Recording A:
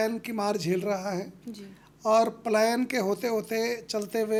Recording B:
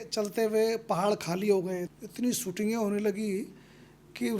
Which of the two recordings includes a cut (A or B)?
B